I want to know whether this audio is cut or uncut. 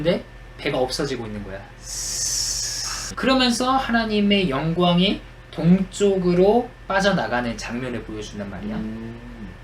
cut